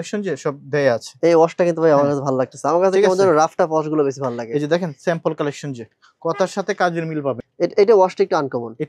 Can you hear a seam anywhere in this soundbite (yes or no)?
yes